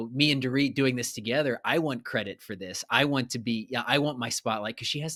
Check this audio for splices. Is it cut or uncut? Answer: uncut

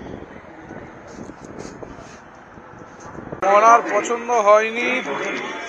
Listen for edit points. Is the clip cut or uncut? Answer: cut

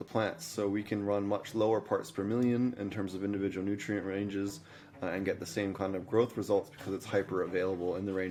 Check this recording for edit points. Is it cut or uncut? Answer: uncut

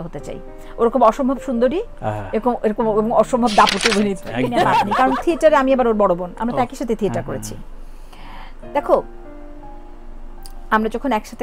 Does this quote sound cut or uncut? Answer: cut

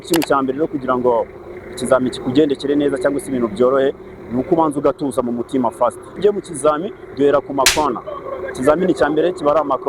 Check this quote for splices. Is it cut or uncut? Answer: cut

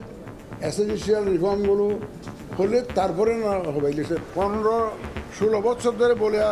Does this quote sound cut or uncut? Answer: cut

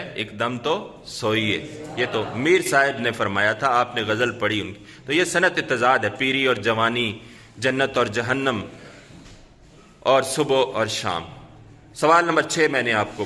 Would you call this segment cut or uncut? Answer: uncut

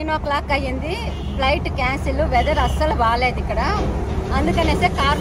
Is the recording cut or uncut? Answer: uncut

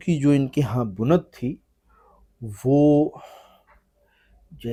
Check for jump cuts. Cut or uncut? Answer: uncut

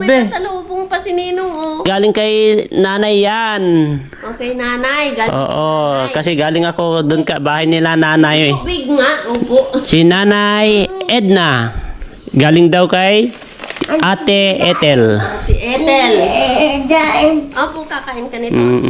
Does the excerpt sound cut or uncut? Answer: cut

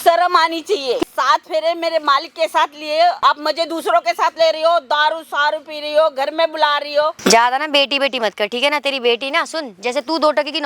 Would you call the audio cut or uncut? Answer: cut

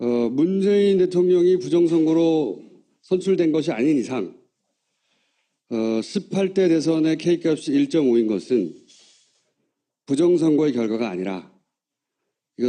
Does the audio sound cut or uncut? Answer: uncut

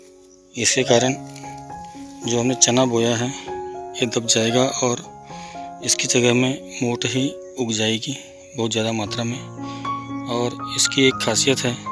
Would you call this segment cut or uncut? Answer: uncut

